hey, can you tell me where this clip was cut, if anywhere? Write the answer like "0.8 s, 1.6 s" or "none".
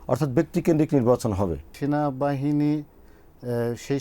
1.7 s